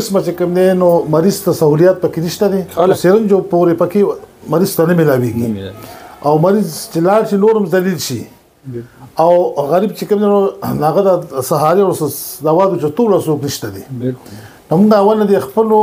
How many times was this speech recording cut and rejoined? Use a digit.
1